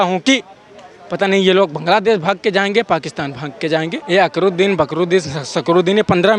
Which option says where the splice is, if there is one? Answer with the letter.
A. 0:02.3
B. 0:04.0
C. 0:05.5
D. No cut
B